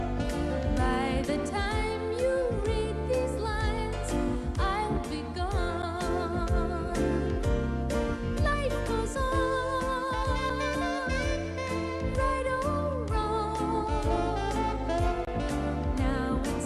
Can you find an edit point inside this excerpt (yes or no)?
yes